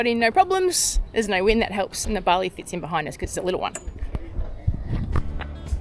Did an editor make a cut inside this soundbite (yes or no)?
no